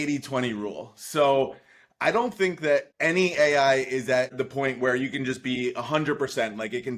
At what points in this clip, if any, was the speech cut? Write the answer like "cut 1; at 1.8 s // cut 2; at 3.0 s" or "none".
cut 1; at 4.3 s